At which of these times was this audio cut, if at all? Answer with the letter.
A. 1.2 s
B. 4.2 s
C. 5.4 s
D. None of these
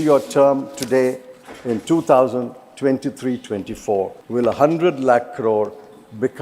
B